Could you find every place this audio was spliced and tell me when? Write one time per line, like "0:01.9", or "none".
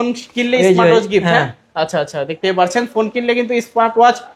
none

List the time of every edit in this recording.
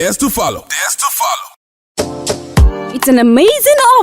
0:01.5

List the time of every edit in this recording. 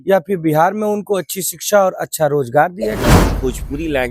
0:03.2

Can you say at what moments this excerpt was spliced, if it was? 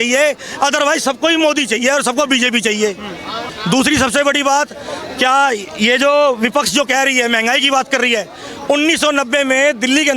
0:03.5

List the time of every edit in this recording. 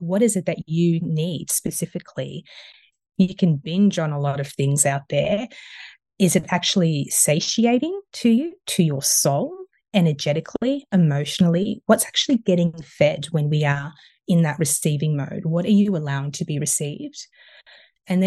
0:02.8

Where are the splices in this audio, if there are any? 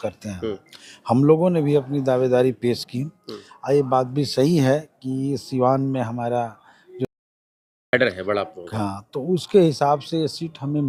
none

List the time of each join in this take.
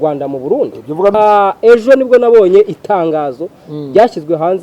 0:01.1

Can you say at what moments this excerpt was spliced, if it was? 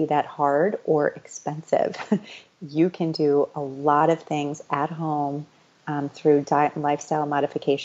none

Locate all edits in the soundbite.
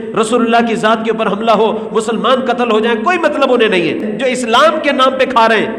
0:04.1

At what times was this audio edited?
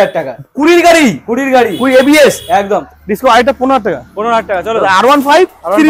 0:02.9

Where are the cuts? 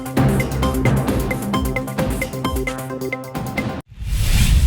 0:03.8

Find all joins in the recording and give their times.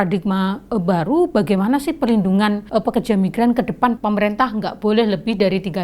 0:02.6
0:04.0

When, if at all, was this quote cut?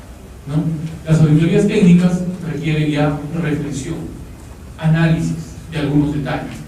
0:03.2

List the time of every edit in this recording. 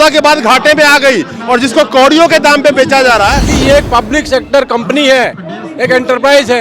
0:03.5

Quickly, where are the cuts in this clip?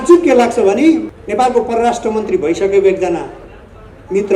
0:01.1

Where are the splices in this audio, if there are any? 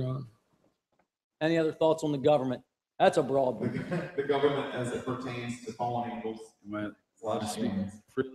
none

